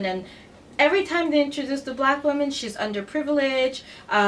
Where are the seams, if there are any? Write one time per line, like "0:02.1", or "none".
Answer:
none